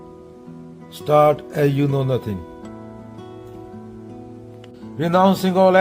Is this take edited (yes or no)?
yes